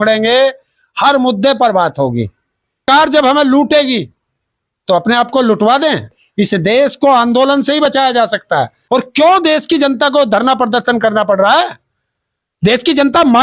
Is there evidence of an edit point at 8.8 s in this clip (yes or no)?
yes